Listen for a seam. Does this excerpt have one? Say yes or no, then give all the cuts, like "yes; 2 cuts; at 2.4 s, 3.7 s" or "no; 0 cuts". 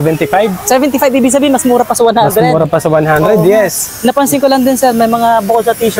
no; 0 cuts